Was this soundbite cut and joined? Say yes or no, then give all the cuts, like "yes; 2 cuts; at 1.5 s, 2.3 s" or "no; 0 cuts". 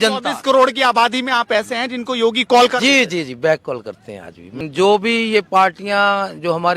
yes; 1 cut; at 4.6 s